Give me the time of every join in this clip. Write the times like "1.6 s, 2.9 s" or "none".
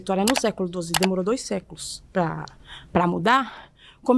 none